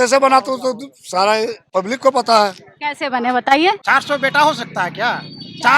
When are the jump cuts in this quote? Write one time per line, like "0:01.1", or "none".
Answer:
0:01.6
0:03.8

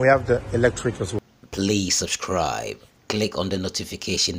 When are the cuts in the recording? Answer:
0:01.1

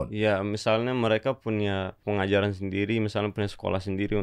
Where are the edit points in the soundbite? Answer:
0:02.0

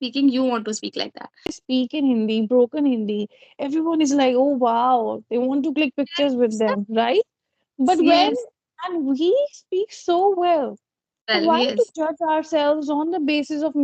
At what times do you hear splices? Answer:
0:01.5

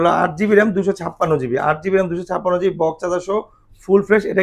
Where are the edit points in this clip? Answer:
none

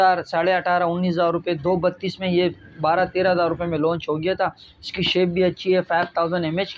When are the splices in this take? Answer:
none

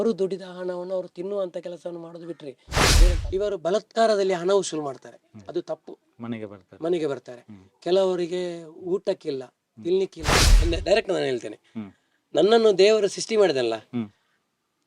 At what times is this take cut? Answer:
0:02.9
0:10.5

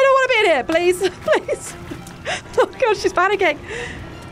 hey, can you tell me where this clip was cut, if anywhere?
none

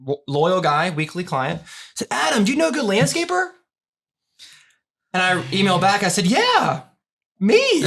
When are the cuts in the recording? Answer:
none

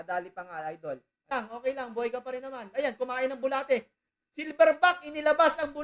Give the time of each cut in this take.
0:01.3

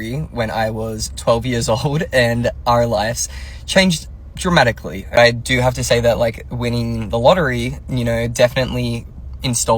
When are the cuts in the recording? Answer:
0:05.2

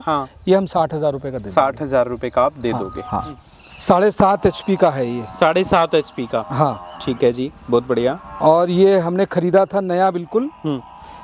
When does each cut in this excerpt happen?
0:03.3

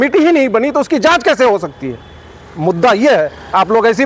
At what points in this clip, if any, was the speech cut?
none

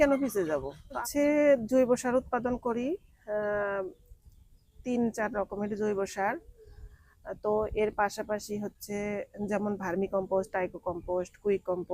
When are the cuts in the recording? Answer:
0:01.0

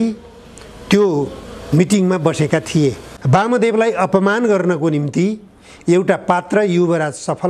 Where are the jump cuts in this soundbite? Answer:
0:03.1

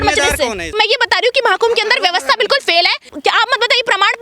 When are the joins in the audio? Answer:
0:00.7
0:03.0

